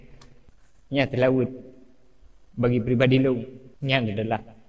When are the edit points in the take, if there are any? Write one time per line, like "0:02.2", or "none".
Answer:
0:03.6